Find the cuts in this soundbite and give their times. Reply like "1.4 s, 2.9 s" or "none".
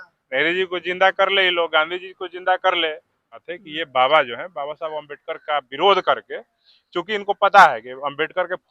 3.5 s